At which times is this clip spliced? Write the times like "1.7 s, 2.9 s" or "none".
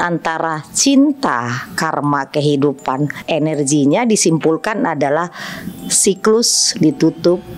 3.1 s